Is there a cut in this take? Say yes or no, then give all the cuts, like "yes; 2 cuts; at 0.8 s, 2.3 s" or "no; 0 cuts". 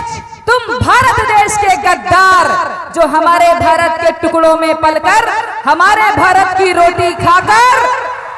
no; 0 cuts